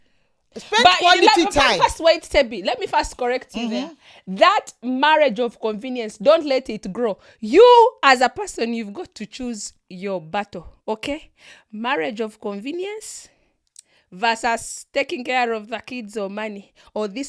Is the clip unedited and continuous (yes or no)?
yes